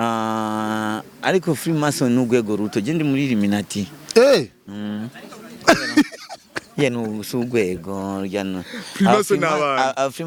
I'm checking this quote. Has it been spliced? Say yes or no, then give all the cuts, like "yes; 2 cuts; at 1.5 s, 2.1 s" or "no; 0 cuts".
no; 0 cuts